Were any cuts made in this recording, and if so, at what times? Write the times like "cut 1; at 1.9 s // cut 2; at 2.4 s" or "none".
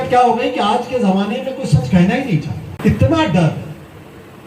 cut 1; at 2.7 s